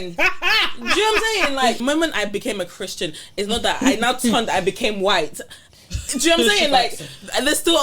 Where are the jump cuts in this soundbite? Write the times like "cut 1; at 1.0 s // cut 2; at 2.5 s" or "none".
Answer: cut 1; at 1.8 s